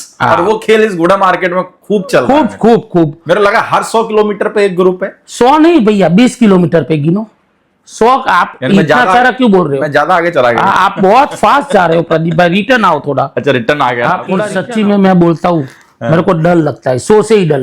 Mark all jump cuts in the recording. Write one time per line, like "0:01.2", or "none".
0:14.4